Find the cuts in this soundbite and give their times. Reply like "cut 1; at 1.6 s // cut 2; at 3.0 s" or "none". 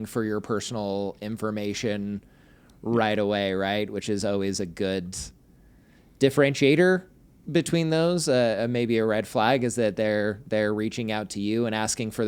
none

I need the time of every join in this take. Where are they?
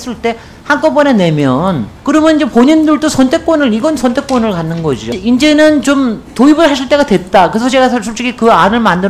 cut 1; at 1.9 s // cut 2; at 5.1 s

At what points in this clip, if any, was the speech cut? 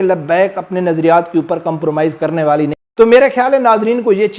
cut 1; at 2.7 s

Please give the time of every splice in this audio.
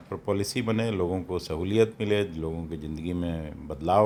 none

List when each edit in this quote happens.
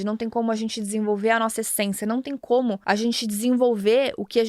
cut 1; at 2.8 s

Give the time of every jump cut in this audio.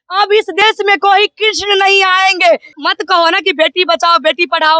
cut 1; at 2.8 s

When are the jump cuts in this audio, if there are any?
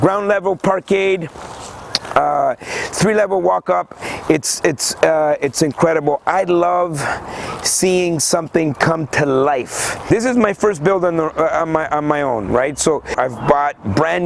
cut 1; at 10.0 s // cut 2; at 13.1 s

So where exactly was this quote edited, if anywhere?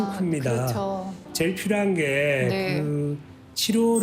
cut 1; at 1.2 s

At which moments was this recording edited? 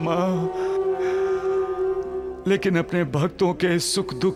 none

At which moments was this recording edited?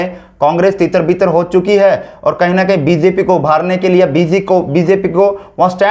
none

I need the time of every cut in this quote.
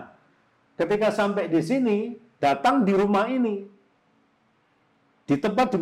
none

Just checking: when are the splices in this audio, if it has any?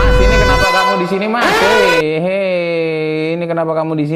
none

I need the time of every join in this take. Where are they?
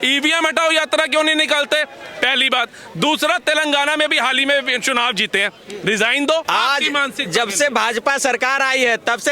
cut 1; at 6.5 s

